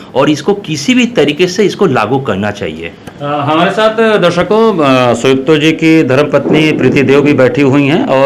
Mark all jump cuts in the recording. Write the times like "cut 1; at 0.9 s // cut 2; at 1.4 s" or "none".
none